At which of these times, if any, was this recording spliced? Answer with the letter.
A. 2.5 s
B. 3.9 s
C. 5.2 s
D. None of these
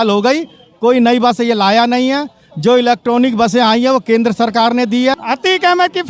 C